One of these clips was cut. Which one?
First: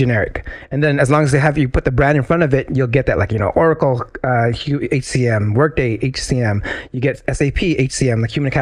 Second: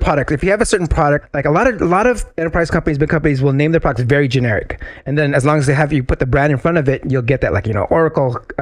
second; 2 cuts; at 1.3 s, 2.3 s

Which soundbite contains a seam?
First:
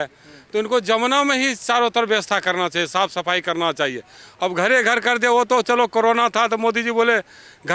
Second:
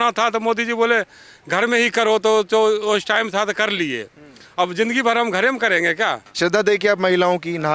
second; 1 cut; at 6.3 s

